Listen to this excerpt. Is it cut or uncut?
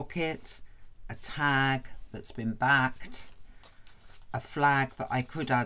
uncut